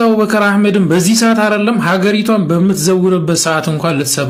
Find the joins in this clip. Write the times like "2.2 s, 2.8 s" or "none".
none